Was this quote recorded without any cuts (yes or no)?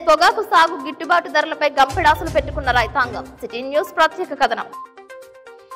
yes